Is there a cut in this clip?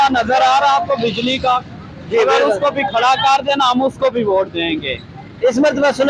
no; 0 cuts

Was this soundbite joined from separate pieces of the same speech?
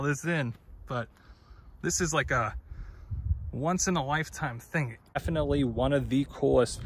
yes; 1 cut; at 5.2 s

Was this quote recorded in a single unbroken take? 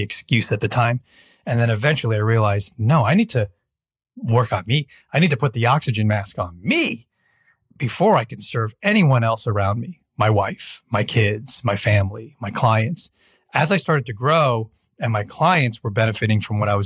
yes; 0 cuts

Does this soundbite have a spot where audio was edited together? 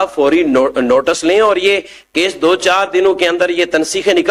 no; 0 cuts

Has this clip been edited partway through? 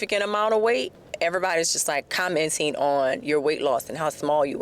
yes; 2 cuts; at 1.0 s, 2.1 s

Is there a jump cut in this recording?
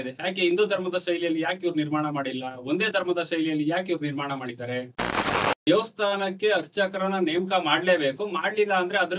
yes; 1 cut; at 5.3 s

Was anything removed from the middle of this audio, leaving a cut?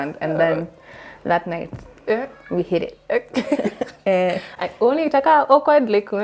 no; 0 cuts

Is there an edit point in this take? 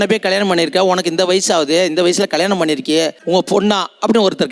no; 0 cuts

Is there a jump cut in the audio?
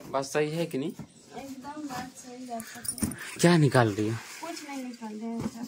no; 0 cuts

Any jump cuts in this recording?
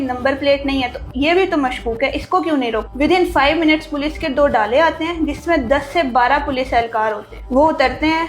yes; 2 cuts; at 2.9 s, 7.3 s

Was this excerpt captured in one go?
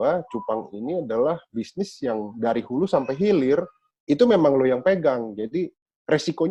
yes; 0 cuts

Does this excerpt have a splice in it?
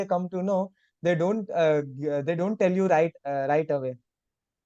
no; 0 cuts

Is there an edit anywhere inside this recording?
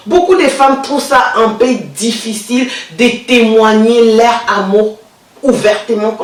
no; 0 cuts

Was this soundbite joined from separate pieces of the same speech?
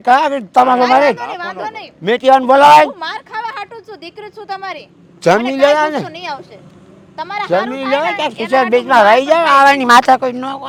no; 0 cuts

